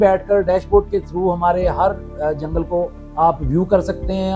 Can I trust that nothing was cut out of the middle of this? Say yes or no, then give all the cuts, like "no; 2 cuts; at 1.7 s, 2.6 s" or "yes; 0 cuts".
yes; 0 cuts